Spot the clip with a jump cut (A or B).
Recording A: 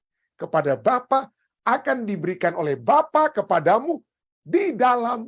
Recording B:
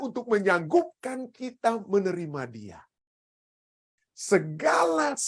B